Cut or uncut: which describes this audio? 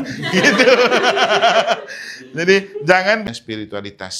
cut